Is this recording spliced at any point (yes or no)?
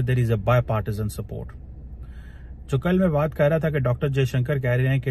no